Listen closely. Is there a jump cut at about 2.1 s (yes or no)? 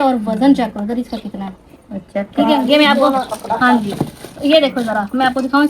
no